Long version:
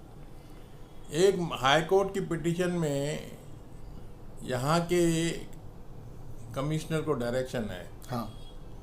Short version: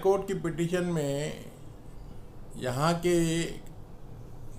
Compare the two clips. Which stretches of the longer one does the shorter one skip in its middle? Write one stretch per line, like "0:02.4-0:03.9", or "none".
none